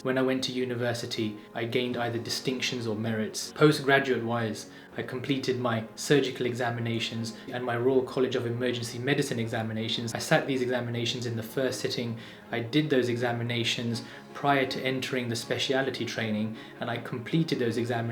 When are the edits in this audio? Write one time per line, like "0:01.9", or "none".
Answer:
0:01.5
0:07.4